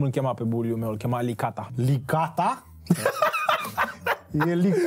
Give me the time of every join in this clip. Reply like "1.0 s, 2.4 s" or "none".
none